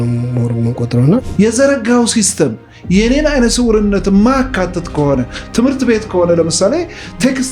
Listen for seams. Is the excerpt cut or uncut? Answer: cut